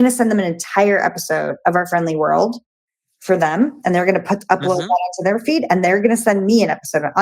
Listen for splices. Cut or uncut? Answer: uncut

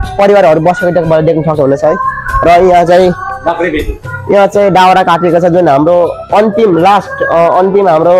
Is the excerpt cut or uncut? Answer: uncut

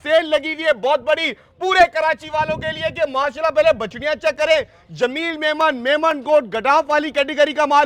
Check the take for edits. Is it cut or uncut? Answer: uncut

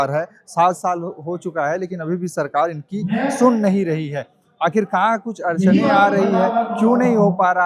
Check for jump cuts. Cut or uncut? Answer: uncut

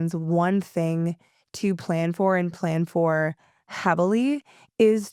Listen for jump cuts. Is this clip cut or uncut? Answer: uncut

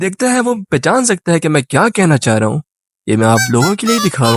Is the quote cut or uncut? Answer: uncut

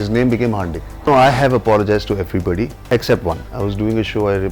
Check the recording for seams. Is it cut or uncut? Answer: cut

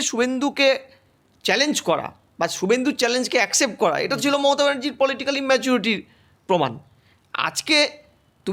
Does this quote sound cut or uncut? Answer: uncut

